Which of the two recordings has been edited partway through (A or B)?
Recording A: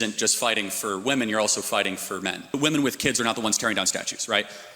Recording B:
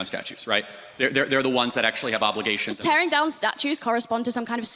A